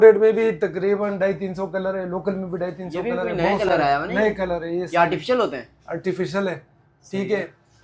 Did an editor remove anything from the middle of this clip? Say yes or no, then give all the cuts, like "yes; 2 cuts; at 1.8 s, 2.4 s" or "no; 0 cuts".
no; 0 cuts